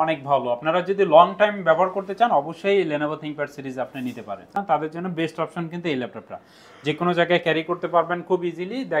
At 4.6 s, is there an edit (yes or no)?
yes